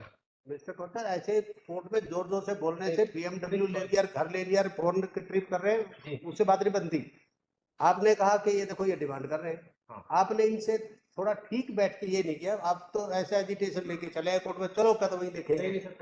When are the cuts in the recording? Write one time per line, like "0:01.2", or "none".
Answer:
none